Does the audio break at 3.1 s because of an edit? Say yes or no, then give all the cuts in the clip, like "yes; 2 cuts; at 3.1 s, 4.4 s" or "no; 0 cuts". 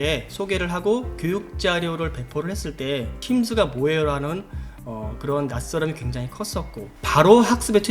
yes; 2 cuts; at 3.1 s, 7.1 s